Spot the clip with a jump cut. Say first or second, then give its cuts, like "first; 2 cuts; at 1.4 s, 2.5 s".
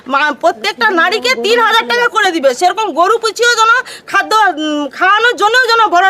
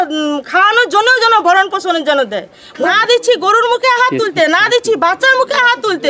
second; 1 cut; at 2.9 s